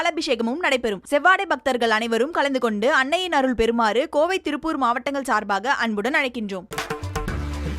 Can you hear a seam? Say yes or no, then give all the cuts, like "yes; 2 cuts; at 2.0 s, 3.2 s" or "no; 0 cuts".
yes; 1 cut; at 6.7 s